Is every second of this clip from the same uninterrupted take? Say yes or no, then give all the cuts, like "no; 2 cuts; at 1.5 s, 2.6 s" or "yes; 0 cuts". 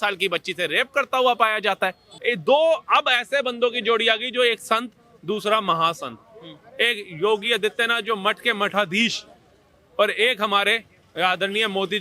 no; 1 cut; at 2.1 s